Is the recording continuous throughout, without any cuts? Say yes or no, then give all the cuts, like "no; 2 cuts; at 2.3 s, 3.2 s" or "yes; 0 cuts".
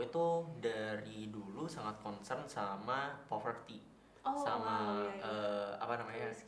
yes; 0 cuts